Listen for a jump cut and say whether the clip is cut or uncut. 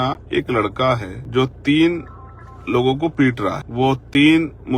cut